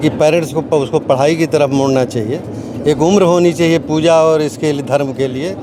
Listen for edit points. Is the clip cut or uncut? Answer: uncut